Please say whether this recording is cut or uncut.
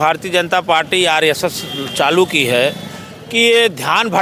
uncut